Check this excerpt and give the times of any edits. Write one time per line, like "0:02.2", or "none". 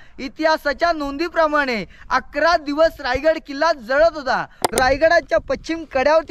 0:04.6